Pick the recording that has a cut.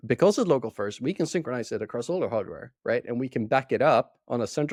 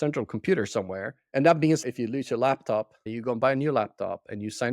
second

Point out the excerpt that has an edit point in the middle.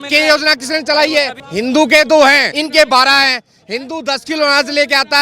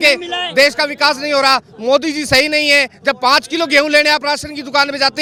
first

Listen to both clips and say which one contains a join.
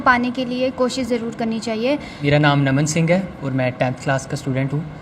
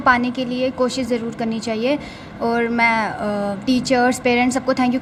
first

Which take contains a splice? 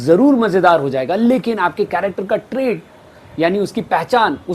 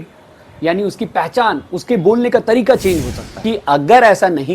second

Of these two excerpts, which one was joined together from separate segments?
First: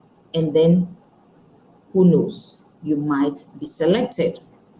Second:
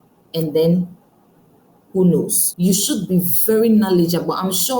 second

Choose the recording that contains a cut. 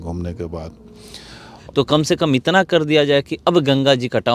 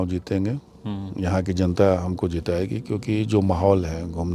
first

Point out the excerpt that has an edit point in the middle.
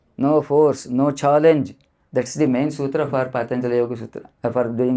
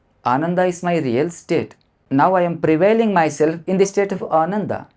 second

